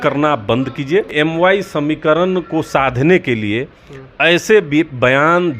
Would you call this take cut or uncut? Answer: cut